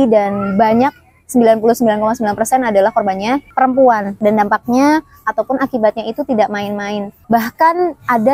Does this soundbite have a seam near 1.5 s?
no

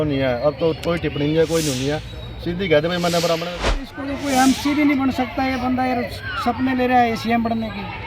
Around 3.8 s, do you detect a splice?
yes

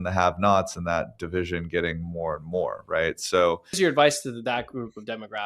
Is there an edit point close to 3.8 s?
yes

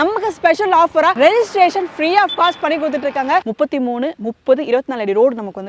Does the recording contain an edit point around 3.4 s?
yes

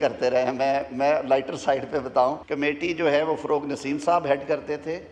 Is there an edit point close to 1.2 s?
no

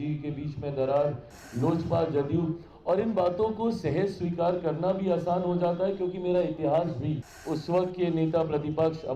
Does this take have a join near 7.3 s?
yes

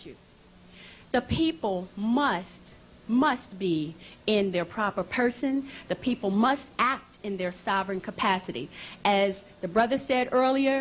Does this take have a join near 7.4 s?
no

